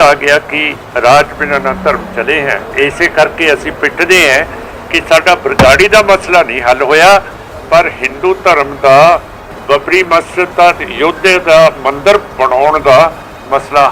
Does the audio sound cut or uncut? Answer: cut